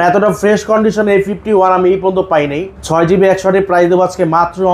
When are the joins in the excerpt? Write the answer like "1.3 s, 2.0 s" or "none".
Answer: 2.8 s